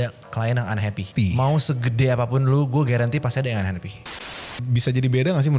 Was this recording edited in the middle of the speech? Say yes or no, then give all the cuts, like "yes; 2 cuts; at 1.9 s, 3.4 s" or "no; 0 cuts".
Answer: yes; 2 cuts; at 1.1 s, 4.0 s